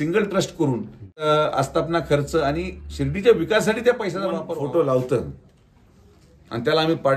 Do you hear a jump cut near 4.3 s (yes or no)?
yes